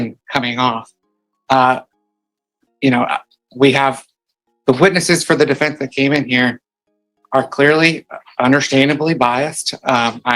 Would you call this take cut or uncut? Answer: uncut